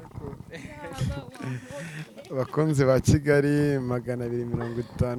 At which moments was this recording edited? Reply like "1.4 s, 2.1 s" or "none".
none